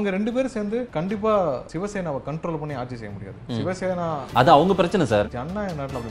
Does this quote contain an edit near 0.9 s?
yes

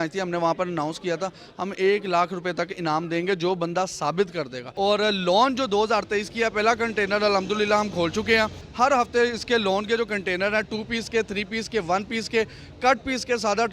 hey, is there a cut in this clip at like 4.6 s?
yes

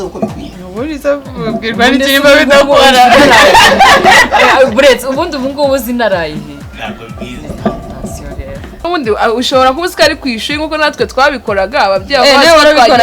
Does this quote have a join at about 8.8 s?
yes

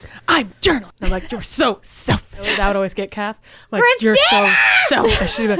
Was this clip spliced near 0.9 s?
yes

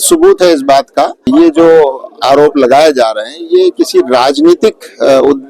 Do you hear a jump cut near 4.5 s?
no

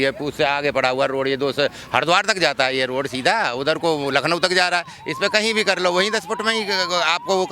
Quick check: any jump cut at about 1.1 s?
no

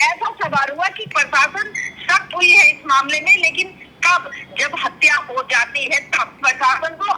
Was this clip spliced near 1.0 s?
yes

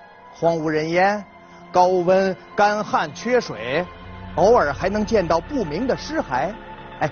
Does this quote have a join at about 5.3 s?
yes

